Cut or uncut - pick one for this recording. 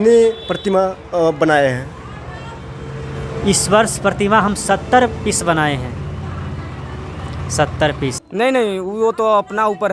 cut